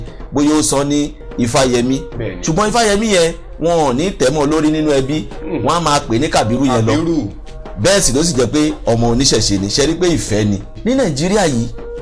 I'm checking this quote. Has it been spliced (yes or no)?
yes